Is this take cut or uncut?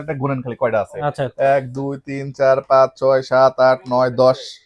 uncut